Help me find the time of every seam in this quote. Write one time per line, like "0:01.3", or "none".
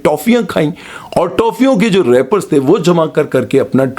none